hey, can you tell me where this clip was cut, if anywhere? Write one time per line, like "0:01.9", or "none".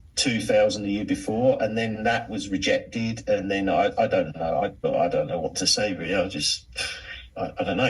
0:04.8